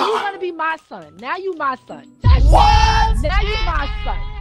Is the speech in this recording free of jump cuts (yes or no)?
yes